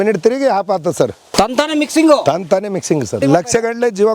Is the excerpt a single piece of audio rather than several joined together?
no; 2 cuts; at 1.2 s, 3.2 s

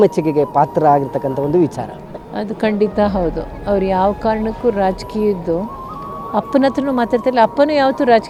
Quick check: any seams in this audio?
no; 0 cuts

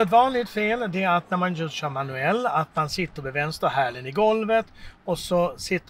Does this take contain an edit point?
no; 0 cuts

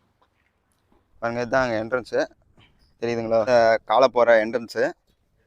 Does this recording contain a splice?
yes; 1 cut; at 3.5 s

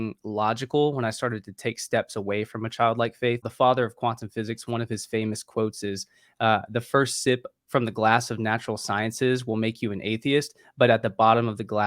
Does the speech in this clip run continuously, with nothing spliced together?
no; 1 cut; at 3.5 s

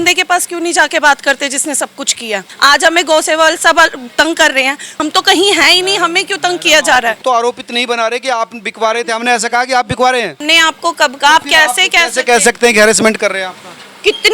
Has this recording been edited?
yes; 4 cuts; at 2.4 s, 5.0 s, 7.2 s, 10.4 s

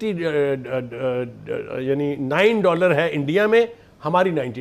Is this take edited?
no; 0 cuts

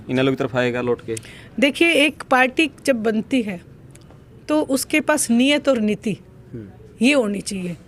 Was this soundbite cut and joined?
no; 0 cuts

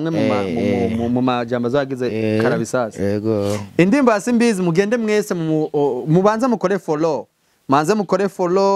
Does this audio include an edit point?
no; 0 cuts

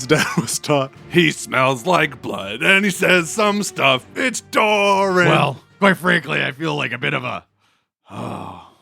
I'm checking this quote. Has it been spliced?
yes; 2 cuts; at 1.0 s, 5.3 s

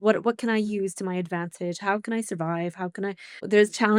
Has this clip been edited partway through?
no; 0 cuts

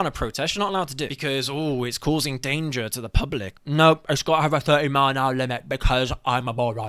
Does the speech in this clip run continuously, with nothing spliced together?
no; 2 cuts; at 1.1 s, 3.5 s

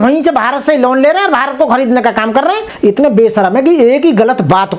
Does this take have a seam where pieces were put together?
yes; 1 cut; at 2.7 s

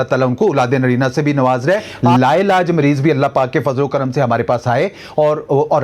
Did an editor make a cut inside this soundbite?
yes; 1 cut; at 2.0 s

